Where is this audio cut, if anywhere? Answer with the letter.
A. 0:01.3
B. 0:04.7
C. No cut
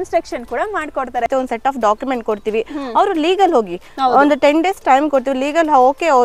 A